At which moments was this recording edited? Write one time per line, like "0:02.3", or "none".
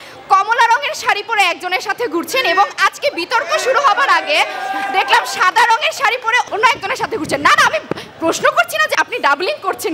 0:08.9

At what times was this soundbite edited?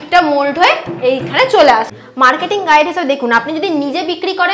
0:02.0

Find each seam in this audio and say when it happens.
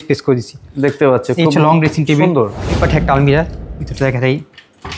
0:02.8

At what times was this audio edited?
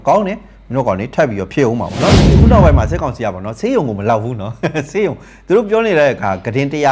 0:02.3

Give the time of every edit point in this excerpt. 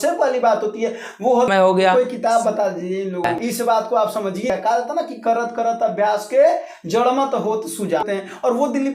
0:01.5
0:03.3
0:04.5
0:08.0

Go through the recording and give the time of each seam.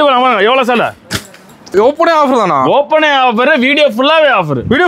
0:01.7

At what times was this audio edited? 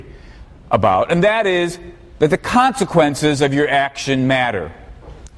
0:03.1

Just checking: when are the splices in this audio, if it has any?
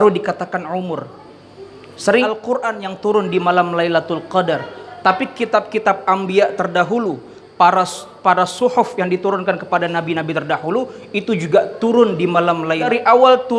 0:02.2
0:12.9

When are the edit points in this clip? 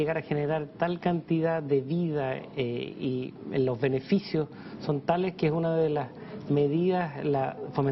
0:04.5

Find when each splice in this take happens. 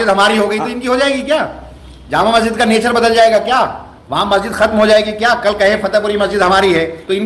none

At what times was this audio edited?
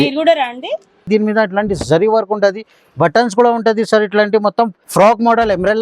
0:01.0
0:04.8

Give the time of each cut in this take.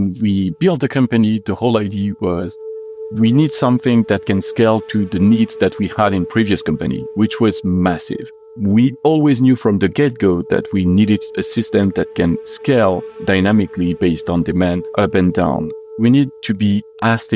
0:08.4
0:14.8
0:15.8

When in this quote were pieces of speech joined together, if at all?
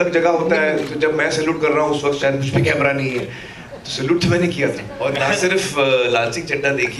0:04.9

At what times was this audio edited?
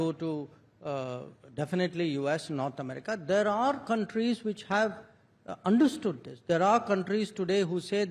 none

